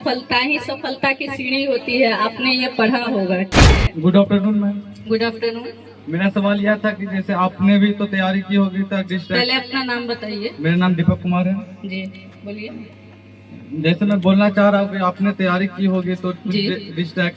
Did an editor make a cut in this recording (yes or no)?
yes